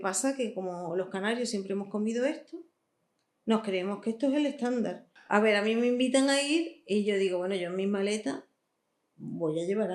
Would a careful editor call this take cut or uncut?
cut